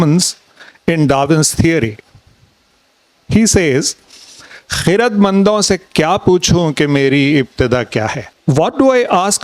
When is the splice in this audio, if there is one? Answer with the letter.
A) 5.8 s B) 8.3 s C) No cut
B